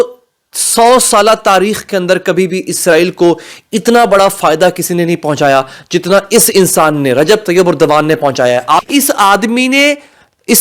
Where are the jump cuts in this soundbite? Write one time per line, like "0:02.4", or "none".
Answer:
0:08.8

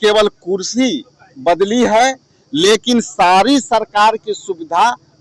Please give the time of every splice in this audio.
none

